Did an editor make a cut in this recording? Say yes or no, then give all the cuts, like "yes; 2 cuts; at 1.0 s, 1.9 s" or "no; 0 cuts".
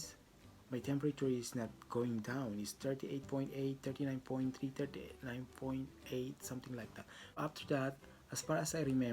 yes; 1 cut; at 6.9 s